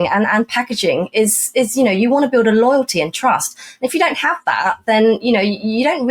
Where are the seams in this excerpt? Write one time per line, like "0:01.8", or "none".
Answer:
none